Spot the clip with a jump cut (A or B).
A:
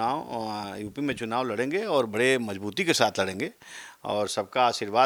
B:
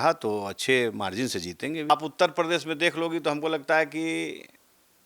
B